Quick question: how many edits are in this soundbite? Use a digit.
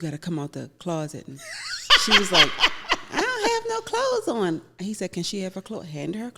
0